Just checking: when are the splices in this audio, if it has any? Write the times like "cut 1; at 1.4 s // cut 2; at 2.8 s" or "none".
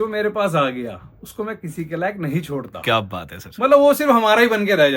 none